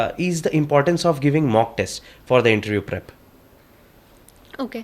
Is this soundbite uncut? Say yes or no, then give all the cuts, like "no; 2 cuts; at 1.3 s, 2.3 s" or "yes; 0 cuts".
yes; 0 cuts